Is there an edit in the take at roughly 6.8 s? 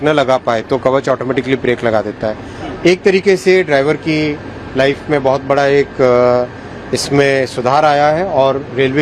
no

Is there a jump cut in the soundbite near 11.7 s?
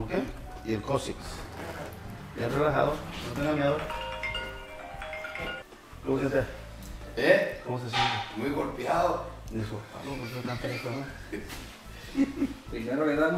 no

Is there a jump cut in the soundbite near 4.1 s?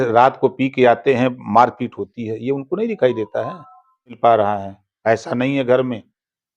yes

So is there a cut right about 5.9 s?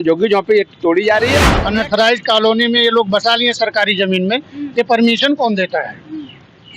no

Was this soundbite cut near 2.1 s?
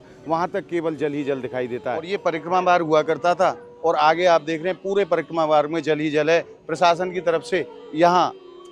yes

